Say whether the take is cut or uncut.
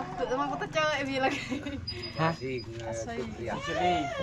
uncut